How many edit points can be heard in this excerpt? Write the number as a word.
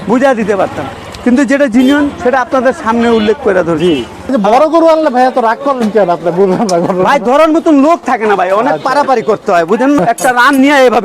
two